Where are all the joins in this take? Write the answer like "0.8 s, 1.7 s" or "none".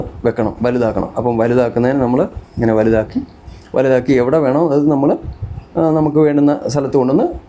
none